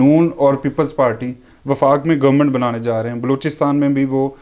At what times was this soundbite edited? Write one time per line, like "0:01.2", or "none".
none